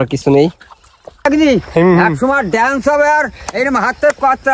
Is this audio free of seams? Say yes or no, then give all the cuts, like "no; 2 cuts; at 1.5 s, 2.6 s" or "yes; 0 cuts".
no; 1 cut; at 1.2 s